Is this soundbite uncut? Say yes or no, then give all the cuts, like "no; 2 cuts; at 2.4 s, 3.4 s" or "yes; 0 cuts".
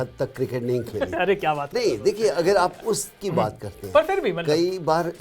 yes; 0 cuts